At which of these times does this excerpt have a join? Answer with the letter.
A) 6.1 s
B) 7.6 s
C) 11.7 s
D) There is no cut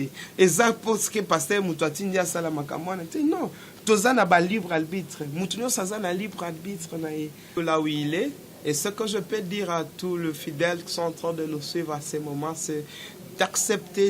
B